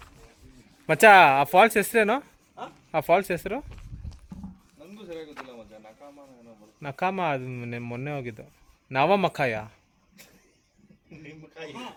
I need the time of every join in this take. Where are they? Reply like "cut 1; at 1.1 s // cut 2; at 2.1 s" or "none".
none

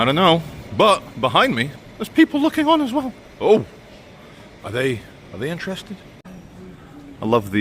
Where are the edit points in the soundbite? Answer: cut 1; at 6.2 s

